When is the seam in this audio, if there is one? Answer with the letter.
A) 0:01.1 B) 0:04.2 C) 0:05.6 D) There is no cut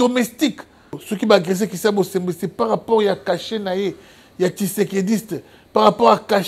A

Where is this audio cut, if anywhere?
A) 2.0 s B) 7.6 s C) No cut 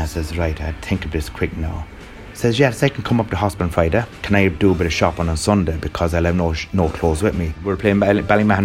B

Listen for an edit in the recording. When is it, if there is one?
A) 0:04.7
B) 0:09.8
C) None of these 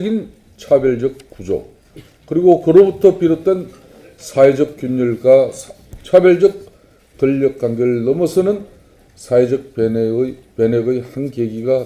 C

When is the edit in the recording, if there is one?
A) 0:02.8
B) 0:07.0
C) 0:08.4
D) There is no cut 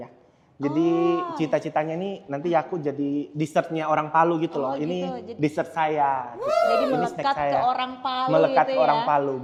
D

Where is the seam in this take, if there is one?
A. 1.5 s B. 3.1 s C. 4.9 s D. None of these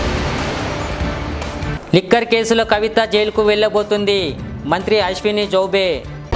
A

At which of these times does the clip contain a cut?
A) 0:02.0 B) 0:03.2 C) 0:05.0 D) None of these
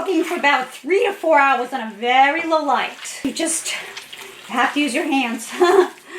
B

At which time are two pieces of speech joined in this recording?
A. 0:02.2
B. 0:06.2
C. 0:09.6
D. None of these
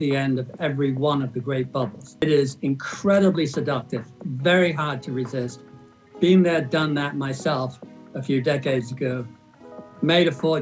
A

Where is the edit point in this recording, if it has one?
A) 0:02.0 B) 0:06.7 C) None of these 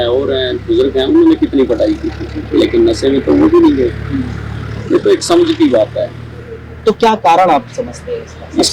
C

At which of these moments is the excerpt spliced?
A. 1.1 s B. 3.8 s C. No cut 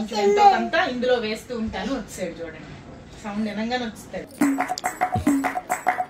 C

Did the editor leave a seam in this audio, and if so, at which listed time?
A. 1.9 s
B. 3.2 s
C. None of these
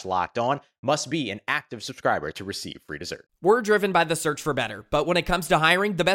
B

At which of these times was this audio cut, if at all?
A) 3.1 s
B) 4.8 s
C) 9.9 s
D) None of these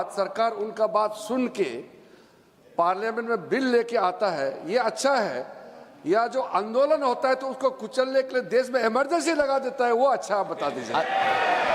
D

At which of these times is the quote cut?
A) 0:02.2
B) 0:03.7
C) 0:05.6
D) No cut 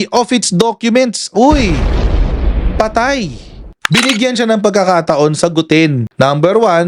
B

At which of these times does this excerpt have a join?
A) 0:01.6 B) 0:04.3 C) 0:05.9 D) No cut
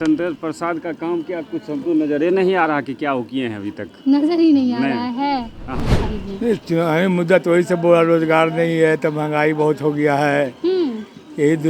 C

